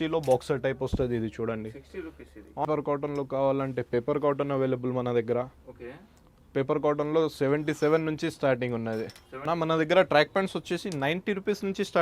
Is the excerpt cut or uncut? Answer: cut